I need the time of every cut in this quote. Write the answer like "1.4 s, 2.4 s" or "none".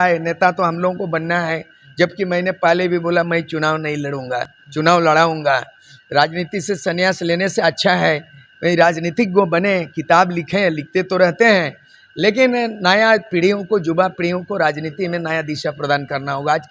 none